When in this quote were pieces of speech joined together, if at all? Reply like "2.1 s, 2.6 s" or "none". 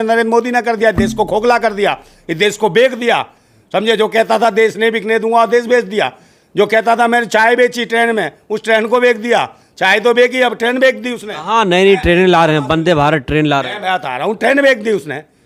none